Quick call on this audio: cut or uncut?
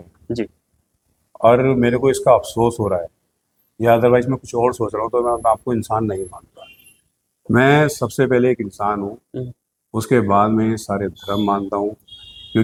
uncut